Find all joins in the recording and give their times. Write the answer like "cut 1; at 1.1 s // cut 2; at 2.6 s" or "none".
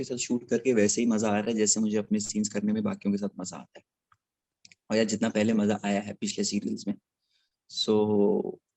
none